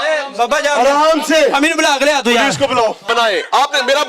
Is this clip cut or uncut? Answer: cut